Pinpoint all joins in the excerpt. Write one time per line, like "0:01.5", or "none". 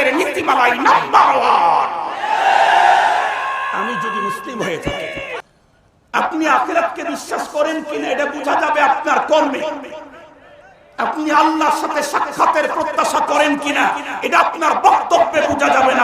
0:05.4